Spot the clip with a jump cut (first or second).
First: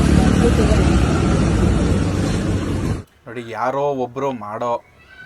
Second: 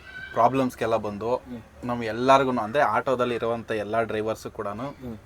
first